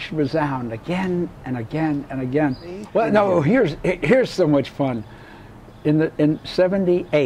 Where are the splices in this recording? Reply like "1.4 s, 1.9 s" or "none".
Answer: 2.8 s